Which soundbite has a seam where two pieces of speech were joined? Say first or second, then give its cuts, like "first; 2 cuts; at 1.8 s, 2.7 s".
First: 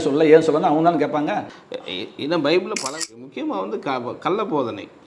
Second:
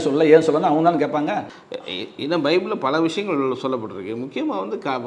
first; 1 cut; at 2.9 s